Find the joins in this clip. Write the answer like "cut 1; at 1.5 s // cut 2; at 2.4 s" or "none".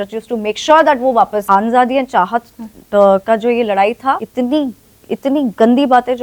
cut 1; at 1.4 s // cut 2; at 4.3 s